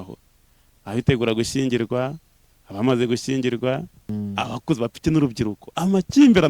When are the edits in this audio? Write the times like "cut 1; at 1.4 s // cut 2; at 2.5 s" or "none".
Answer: cut 1; at 4.0 s